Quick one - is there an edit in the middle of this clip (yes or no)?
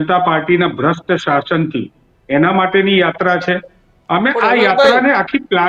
no